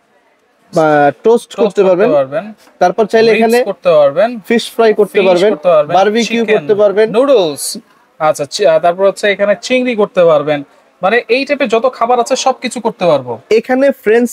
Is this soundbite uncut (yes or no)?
yes